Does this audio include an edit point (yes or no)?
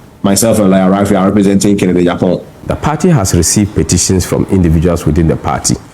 yes